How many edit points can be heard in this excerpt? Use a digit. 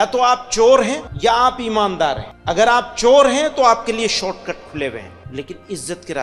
3